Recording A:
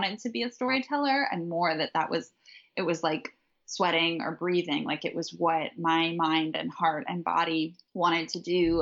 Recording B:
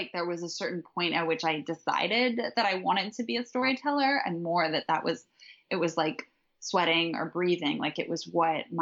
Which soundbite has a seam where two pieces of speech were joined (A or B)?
A